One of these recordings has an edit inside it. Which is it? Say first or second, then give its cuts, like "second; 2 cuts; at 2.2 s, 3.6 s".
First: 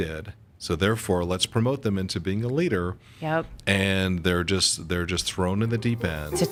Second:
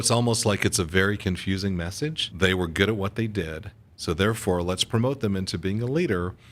second; 1 cut; at 2.2 s